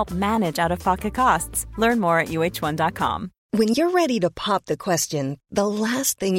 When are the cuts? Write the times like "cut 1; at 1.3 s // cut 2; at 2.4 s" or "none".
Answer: cut 1; at 3.3 s